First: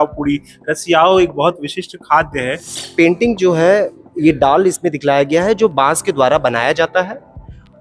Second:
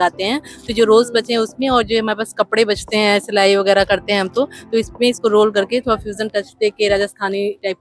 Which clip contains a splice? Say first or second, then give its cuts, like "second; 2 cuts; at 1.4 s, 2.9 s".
first; 1 cut; at 2.7 s